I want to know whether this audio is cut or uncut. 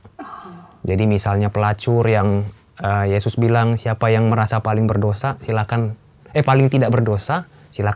uncut